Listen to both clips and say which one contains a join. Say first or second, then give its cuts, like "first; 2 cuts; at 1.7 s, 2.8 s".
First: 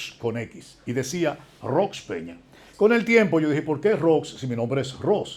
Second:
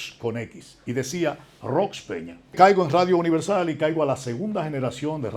second; 1 cut; at 2.5 s